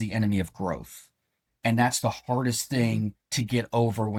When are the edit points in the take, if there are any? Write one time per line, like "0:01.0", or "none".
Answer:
none